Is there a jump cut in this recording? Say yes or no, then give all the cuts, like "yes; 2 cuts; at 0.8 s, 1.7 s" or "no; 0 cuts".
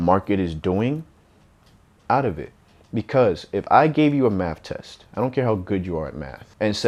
no; 0 cuts